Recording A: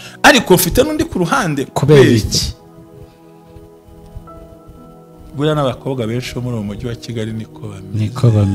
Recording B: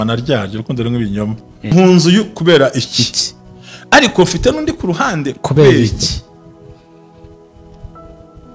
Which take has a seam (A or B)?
B